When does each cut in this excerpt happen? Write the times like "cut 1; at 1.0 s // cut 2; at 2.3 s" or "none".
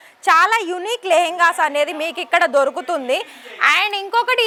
none